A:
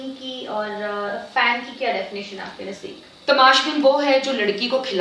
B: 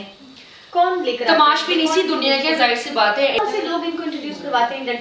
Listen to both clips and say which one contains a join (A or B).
B